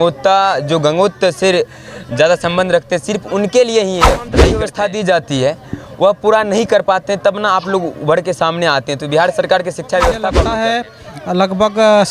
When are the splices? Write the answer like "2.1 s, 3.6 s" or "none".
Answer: 4.4 s, 10.6 s